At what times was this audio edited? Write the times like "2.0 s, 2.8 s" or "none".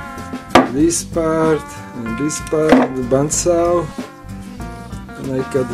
3.2 s